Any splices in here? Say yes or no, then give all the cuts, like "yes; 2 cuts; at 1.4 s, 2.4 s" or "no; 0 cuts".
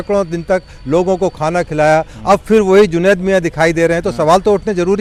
no; 0 cuts